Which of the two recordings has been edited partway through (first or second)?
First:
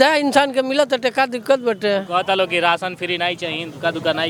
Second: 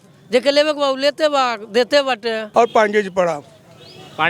second